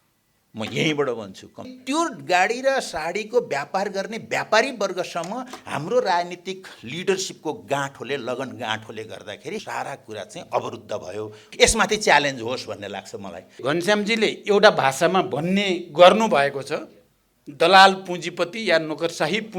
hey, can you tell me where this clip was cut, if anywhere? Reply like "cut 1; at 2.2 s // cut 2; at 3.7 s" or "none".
cut 1; at 1.8 s // cut 2; at 9.6 s // cut 3; at 11.5 s // cut 4; at 13.6 s